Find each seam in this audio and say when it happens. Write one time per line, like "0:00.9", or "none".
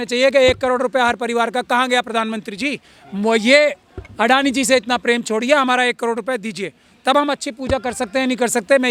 none